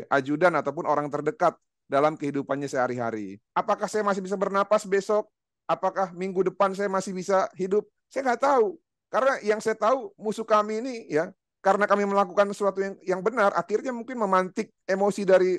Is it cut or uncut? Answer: cut